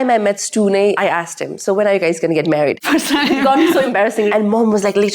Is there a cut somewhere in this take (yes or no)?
yes